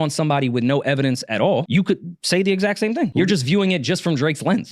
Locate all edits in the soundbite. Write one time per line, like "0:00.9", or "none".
0:03.1